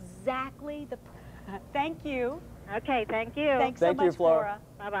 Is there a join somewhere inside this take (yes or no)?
yes